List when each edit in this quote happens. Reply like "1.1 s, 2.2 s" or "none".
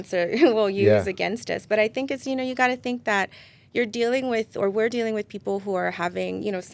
none